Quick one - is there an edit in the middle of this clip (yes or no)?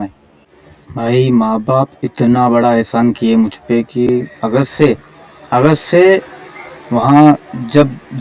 no